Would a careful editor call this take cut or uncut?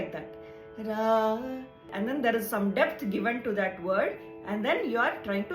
cut